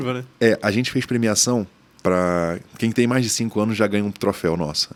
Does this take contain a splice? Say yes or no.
no